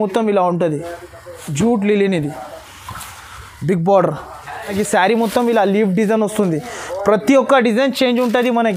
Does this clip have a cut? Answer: yes; 1 cut; at 4.7 s

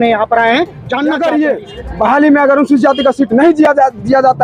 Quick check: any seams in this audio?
yes; 1 cut; at 1.1 s

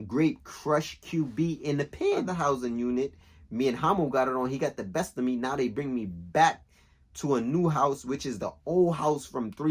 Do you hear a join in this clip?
yes; 1 cut; at 2.3 s

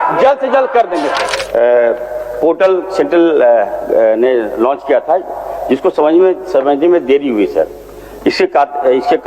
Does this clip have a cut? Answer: yes; 1 cut; at 1.3 s

